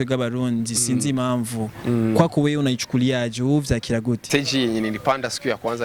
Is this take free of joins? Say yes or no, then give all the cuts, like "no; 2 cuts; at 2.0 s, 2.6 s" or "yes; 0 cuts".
no; 1 cut; at 4.2 s